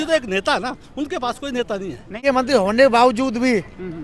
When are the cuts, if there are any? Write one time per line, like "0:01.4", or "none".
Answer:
0:02.2